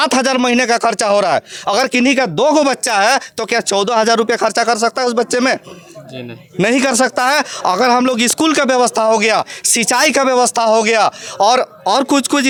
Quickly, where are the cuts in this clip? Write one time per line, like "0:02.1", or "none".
none